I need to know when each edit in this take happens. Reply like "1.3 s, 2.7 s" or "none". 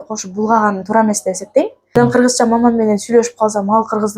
1.9 s